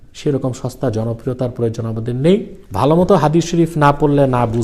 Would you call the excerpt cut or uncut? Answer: cut